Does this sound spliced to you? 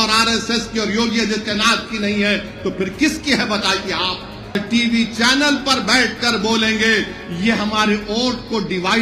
yes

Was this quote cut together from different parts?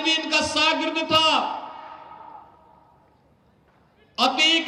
no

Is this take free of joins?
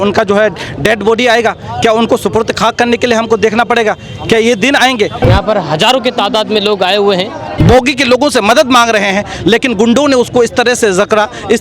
no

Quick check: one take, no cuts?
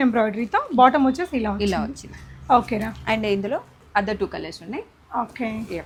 yes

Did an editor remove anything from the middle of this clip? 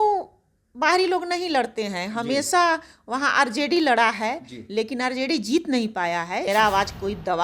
yes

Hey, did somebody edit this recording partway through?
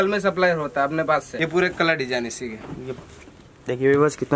yes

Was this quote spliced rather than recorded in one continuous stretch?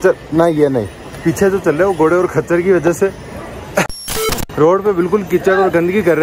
no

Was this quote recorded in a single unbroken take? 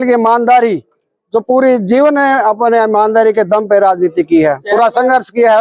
yes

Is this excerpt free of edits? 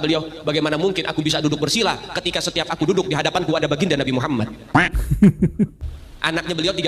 no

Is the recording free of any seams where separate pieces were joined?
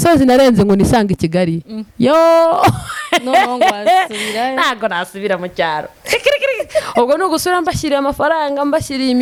yes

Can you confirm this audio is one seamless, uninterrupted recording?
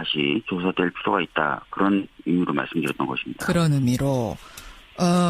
no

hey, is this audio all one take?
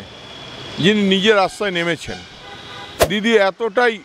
no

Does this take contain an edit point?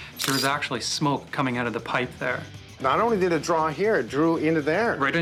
no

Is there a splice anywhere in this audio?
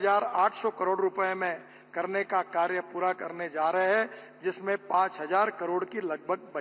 no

